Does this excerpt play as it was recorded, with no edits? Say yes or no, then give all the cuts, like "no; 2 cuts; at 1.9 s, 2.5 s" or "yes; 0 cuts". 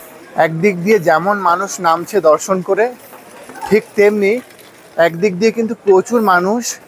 yes; 0 cuts